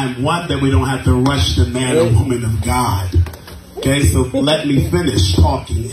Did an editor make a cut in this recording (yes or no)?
yes